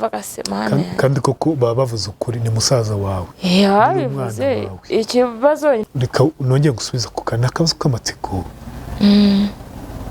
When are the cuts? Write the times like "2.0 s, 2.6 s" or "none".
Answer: 5.9 s

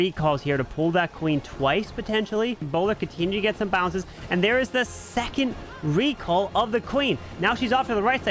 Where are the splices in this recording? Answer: 2.7 s

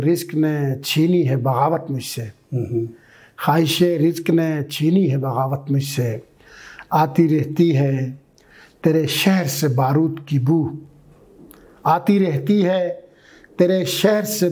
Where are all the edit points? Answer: none

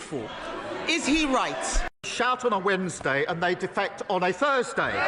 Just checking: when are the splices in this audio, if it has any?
2.1 s

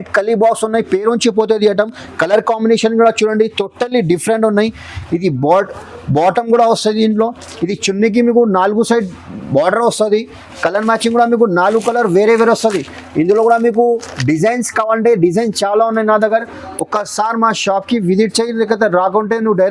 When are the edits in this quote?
none

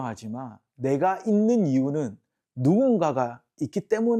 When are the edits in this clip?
none

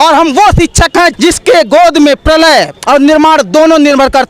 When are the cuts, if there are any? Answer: 1.1 s, 2.7 s

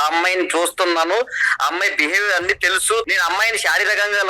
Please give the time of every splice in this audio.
3.1 s

